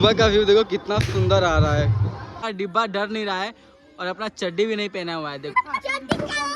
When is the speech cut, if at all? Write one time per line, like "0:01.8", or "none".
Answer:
0:02.4
0:05.5